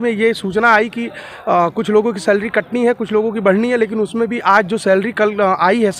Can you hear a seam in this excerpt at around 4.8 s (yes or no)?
no